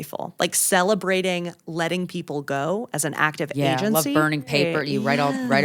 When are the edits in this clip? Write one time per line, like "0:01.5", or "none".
0:04.5